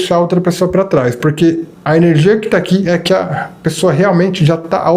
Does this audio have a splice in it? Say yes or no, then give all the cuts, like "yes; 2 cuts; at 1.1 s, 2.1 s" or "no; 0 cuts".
yes; 1 cut; at 1.7 s